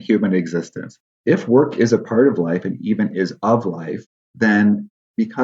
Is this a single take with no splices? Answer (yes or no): no